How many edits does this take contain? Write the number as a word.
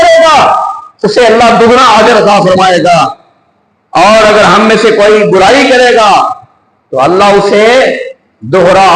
zero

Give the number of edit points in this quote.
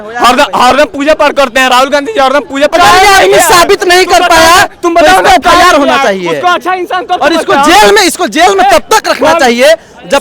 one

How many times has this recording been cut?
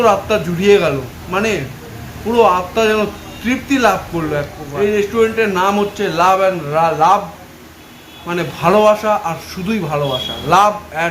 one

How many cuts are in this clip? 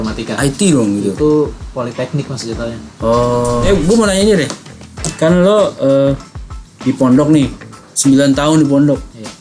one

